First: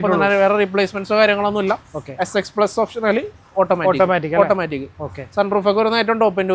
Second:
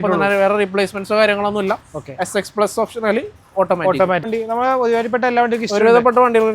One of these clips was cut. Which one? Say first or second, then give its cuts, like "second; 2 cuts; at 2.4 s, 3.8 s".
second; 1 cut; at 4.3 s